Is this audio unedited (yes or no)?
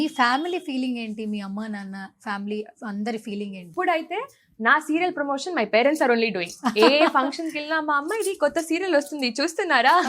no